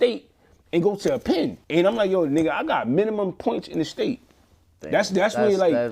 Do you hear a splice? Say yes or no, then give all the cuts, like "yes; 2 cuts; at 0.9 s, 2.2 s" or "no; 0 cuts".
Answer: yes; 1 cut; at 1.6 s